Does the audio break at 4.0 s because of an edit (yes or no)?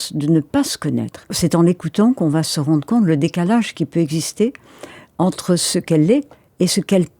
no